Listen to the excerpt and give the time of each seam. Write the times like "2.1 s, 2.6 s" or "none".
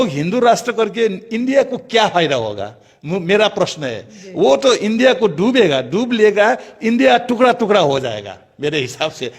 none